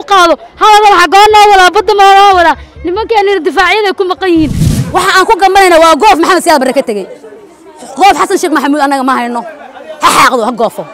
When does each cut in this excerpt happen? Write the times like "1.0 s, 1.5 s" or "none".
4.6 s